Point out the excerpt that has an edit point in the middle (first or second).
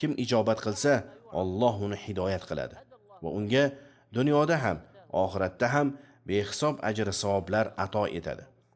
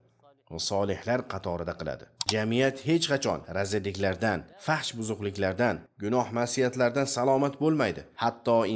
second